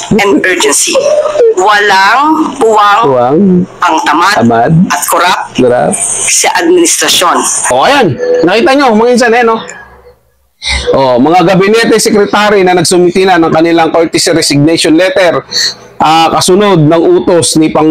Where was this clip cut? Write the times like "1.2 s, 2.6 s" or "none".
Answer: 7.7 s

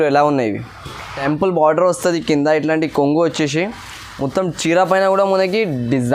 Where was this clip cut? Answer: 1.2 s

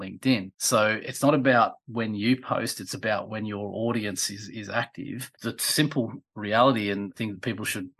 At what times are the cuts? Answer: 5.3 s

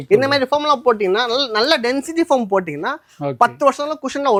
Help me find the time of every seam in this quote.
none

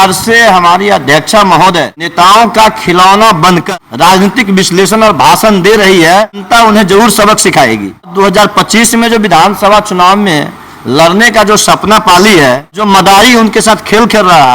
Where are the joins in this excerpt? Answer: 2.1 s, 3.6 s, 6.4 s, 8.1 s, 12.8 s

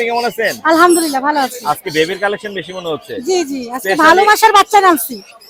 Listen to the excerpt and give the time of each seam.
none

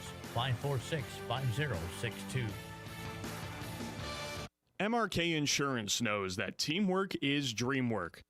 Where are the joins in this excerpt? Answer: 4.5 s

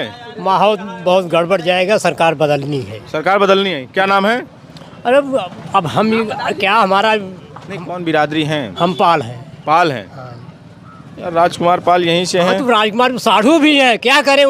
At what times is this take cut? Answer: none

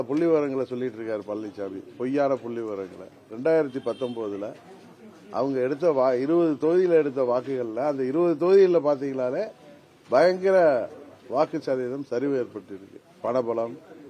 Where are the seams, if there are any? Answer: none

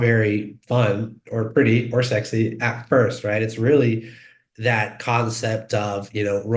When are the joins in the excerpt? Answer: none

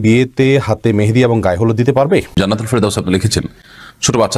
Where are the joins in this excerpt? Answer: 2.3 s

